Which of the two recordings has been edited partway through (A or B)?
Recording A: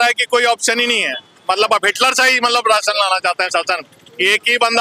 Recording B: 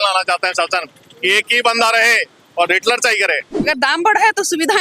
B